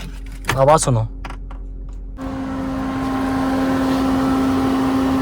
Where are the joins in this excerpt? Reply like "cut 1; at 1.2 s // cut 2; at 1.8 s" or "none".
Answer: cut 1; at 2.2 s